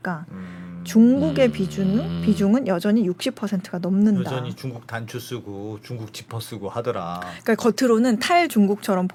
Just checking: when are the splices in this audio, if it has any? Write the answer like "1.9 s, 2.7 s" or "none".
none